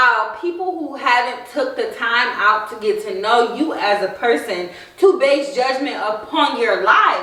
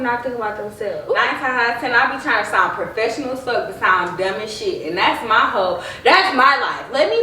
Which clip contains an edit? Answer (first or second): second